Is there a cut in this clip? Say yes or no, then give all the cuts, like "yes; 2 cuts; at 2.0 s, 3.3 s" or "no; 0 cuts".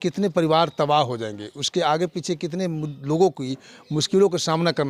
no; 0 cuts